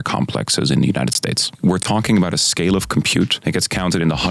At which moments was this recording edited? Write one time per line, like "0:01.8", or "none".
0:01.5
0:03.4